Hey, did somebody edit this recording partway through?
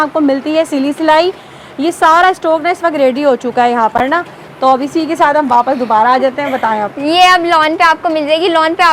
no; 0 cuts

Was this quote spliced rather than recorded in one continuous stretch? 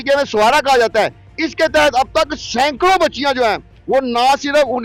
no; 0 cuts

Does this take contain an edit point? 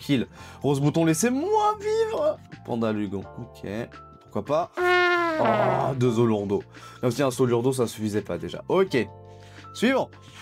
no; 0 cuts

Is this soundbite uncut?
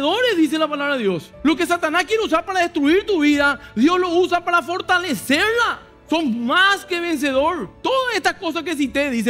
no; 3 cuts; at 1.3 s, 5.9 s, 7.7 s

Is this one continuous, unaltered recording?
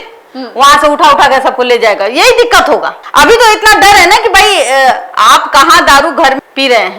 yes; 0 cuts

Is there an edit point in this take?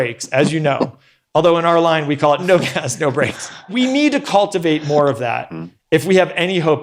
yes; 1 cut; at 3.4 s

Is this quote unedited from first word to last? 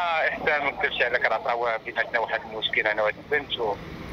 yes; 0 cuts

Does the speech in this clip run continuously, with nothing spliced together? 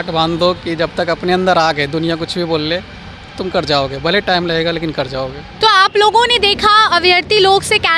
yes; 0 cuts

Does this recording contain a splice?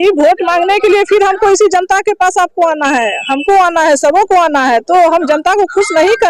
no; 0 cuts

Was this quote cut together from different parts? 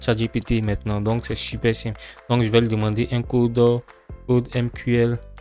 no; 0 cuts

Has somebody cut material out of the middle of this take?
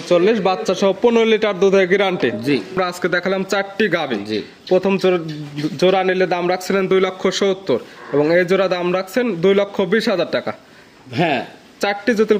yes; 1 cut; at 2.7 s

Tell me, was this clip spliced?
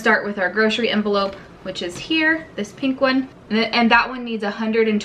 no; 0 cuts

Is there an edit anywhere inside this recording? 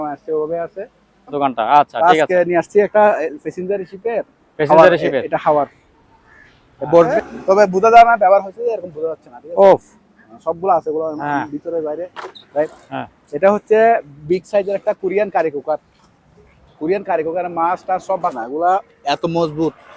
yes; 4 cuts; at 1.4 s, 7.1 s, 12.8 s, 18.3 s

